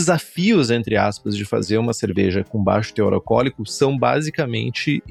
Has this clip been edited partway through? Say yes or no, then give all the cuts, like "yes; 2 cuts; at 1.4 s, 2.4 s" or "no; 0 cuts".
no; 0 cuts